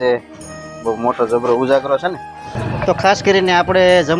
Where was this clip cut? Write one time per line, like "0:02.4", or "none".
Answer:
0:02.7